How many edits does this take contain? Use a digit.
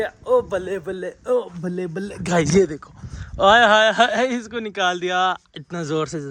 0